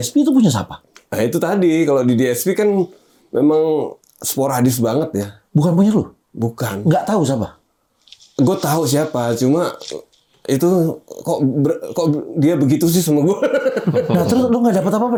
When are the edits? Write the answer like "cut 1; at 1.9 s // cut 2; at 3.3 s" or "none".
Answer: none

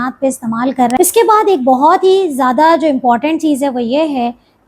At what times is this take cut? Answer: cut 1; at 1.0 s

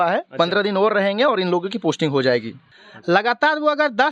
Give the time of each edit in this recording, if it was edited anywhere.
cut 1; at 2.6 s

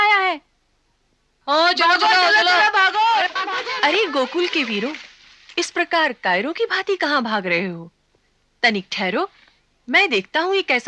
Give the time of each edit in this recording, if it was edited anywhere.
cut 1; at 1.4 s

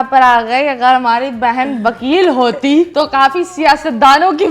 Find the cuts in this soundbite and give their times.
cut 1; at 2.9 s

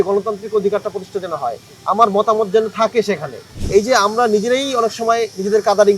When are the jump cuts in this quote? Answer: cut 1; at 3.5 s

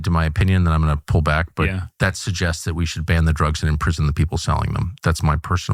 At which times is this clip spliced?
none

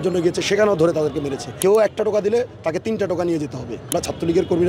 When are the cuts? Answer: cut 1; at 1.5 s // cut 2; at 3.9 s

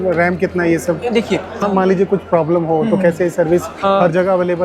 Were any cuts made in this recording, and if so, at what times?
cut 1; at 1.6 s

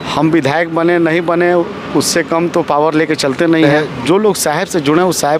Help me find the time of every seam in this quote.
cut 1; at 3.8 s

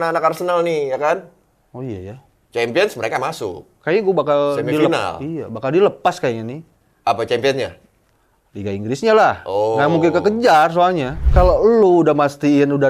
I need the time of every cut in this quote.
cut 1; at 11.2 s

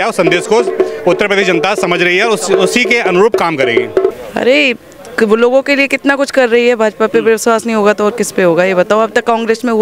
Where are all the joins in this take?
cut 1; at 4.1 s

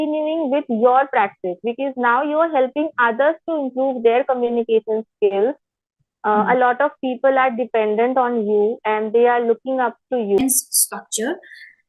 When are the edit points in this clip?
cut 1; at 10.4 s

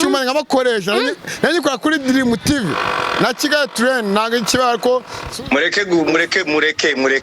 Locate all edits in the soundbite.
cut 1; at 5.2 s

